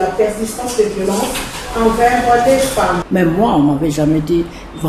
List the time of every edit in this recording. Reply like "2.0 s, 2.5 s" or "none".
3.0 s